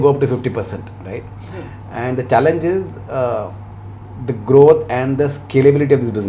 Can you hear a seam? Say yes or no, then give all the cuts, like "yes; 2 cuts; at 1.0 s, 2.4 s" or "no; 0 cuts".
no; 0 cuts